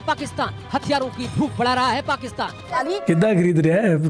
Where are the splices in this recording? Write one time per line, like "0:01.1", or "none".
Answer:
none